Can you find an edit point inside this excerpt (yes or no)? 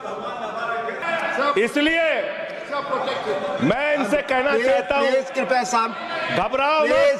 yes